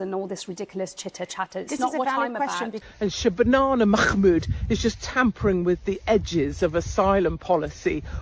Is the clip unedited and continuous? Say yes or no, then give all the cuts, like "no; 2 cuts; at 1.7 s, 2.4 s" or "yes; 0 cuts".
no; 1 cut; at 2.8 s